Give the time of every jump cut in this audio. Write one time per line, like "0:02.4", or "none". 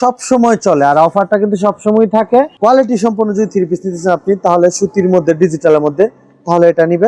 none

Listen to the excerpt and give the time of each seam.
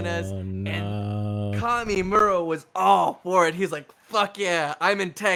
none

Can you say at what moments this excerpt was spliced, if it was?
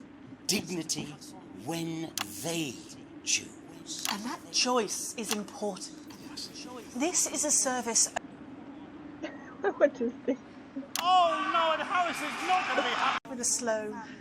0:08.1
0:13.2

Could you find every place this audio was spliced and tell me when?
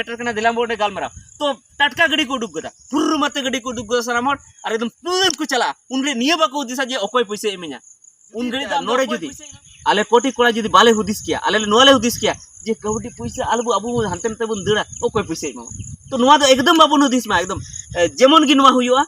0:08.8

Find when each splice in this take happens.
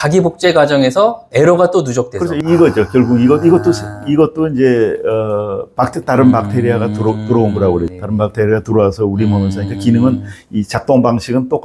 none

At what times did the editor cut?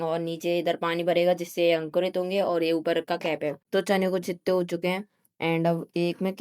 0:03.6

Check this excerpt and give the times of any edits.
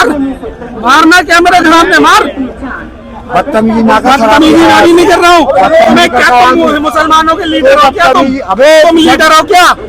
none

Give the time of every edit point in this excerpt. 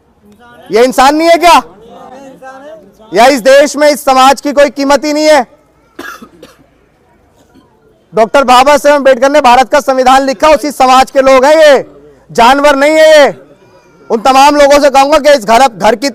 none

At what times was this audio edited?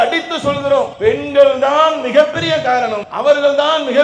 0:00.9
0:03.1

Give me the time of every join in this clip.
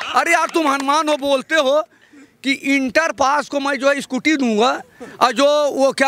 none

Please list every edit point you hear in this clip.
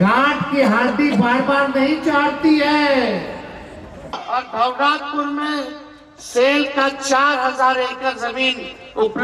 0:04.2

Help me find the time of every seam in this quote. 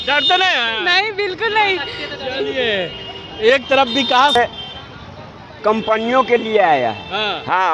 0:04.3

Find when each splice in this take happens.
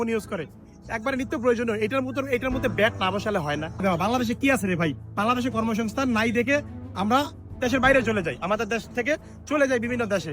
0:03.8

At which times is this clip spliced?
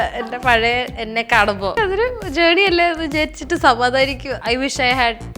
0:01.7
0:04.3

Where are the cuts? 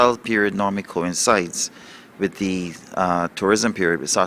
0:01.2

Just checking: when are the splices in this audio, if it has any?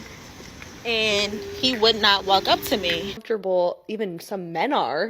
0:03.2

